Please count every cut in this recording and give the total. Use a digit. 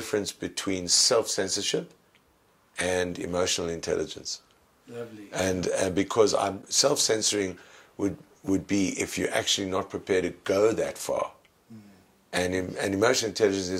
0